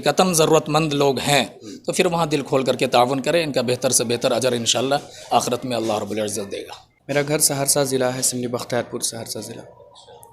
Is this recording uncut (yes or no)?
no